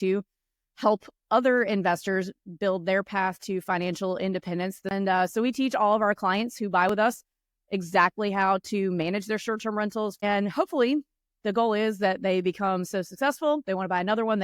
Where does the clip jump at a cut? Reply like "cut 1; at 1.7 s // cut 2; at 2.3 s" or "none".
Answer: cut 1; at 4.9 s // cut 2; at 10.2 s